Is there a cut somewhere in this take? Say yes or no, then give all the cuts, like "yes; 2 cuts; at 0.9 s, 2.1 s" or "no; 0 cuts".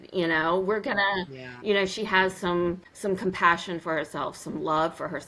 yes; 1 cut; at 2.9 s